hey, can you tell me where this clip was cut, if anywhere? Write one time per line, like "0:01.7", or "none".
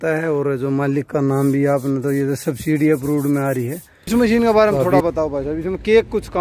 0:04.1